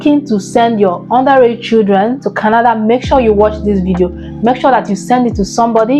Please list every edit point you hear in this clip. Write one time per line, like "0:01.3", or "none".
none